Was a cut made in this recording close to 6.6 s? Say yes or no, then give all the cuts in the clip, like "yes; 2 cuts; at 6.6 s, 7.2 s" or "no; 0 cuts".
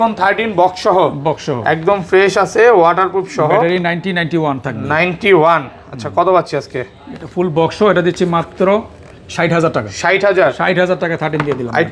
no; 0 cuts